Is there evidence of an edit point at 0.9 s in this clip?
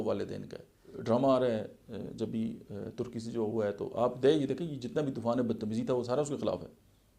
yes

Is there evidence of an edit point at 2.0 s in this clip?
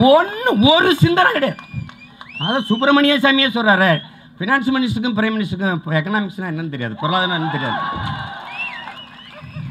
no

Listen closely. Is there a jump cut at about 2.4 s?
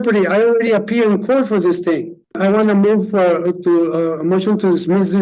yes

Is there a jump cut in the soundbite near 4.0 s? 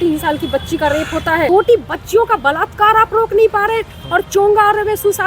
no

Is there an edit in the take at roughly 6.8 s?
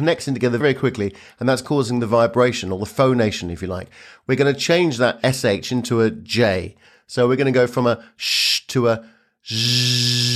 no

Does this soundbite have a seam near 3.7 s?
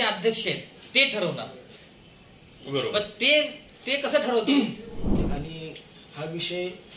no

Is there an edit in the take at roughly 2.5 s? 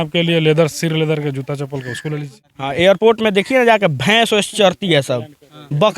yes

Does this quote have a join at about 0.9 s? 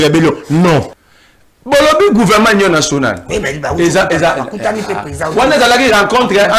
yes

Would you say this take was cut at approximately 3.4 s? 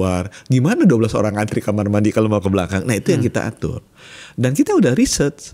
no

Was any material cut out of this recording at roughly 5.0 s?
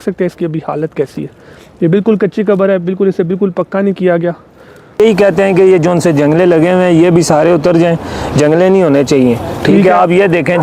yes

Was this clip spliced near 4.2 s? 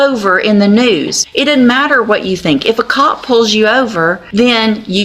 yes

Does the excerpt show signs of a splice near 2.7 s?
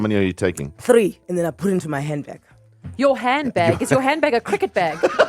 no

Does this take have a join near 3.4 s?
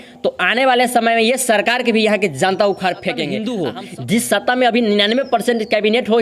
yes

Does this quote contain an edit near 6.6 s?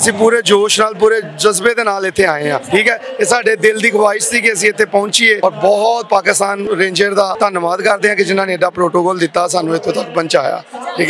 yes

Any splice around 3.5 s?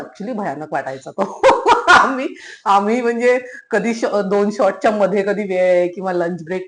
no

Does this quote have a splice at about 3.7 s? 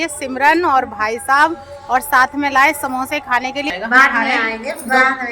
yes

